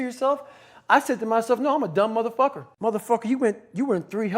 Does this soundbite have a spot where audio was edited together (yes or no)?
yes